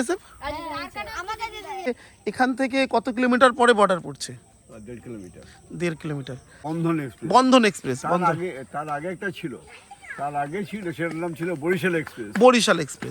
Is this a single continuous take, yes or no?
no